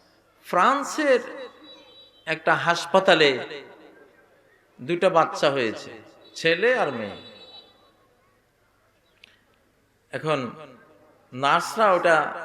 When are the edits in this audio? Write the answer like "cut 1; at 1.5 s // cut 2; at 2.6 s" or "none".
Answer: none